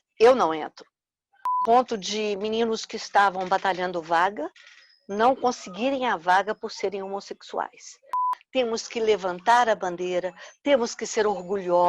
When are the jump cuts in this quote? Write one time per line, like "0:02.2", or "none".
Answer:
0:01.6
0:08.2